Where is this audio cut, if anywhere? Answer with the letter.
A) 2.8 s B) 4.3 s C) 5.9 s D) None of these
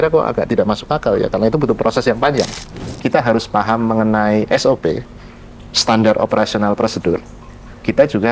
A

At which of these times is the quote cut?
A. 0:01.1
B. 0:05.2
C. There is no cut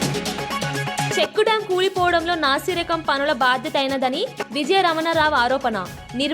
A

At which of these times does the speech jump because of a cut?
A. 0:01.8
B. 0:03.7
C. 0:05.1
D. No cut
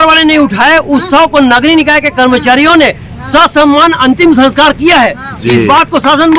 D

